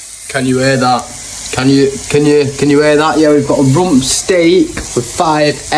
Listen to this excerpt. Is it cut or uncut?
uncut